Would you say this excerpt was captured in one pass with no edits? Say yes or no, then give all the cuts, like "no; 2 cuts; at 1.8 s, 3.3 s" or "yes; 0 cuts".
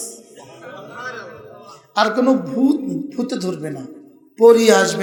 yes; 0 cuts